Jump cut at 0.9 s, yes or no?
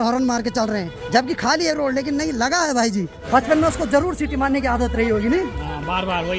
no